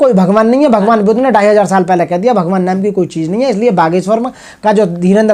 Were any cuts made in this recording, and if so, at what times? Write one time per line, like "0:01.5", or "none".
none